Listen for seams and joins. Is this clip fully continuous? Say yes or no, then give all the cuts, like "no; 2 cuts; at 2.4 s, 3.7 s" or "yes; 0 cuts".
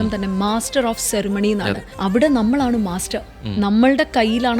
no; 1 cut; at 1.9 s